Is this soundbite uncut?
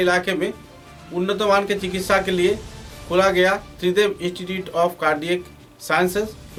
yes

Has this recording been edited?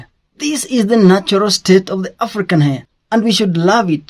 yes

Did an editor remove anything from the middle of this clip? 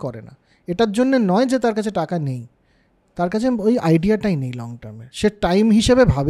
no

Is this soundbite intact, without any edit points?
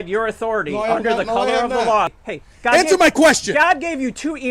no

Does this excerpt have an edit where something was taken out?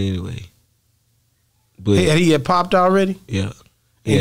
no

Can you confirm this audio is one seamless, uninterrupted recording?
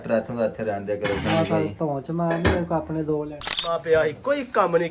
no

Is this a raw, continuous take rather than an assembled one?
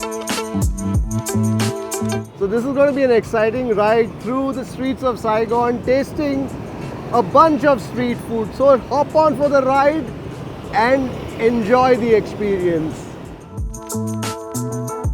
no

